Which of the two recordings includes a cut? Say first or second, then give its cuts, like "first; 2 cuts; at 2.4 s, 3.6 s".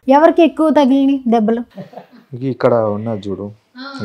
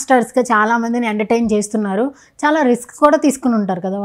first; 1 cut; at 1.7 s